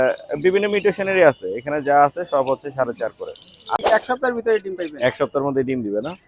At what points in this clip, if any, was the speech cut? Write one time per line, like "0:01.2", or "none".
0:03.8

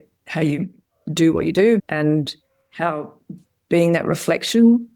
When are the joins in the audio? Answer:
0:01.8

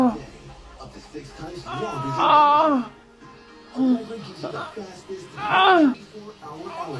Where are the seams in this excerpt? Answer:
0:06.1

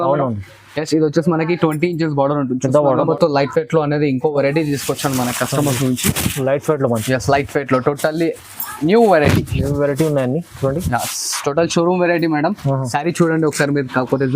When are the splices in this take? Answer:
0:03.1

